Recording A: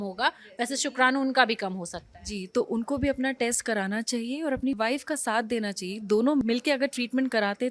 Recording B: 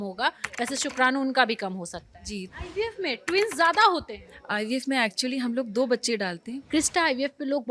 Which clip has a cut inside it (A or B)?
B